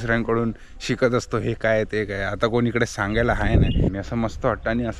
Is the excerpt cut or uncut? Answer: cut